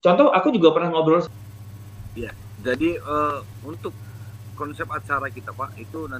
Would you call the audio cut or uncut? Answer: cut